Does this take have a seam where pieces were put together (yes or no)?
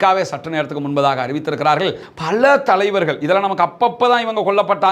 yes